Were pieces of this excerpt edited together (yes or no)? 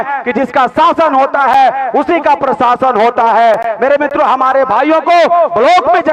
no